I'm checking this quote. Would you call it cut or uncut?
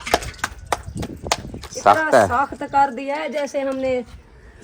uncut